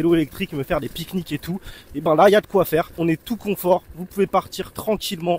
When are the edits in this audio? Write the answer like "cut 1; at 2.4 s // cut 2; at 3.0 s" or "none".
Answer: cut 1; at 2.9 s